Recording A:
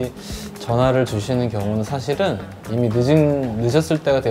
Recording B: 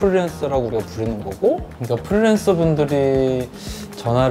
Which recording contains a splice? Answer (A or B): B